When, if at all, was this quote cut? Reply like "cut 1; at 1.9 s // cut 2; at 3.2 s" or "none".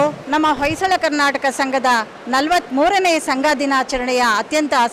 none